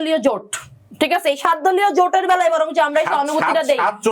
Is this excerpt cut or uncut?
uncut